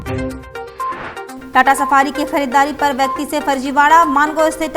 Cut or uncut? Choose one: cut